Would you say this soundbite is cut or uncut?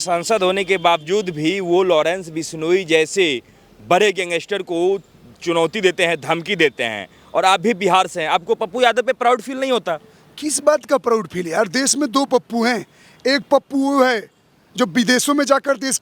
uncut